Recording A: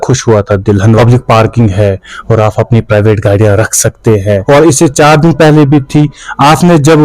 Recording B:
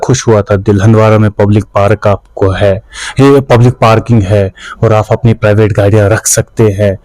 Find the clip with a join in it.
A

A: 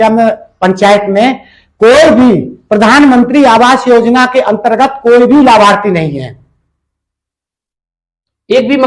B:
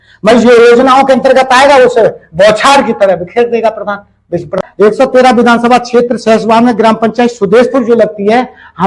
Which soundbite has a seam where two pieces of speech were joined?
B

